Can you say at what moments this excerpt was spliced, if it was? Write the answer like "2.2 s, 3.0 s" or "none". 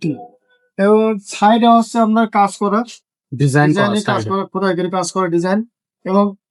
none